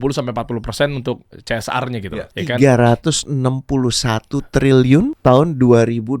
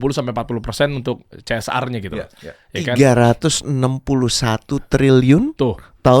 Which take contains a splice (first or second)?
first